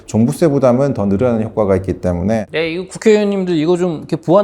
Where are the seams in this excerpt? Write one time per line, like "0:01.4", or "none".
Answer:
0:02.4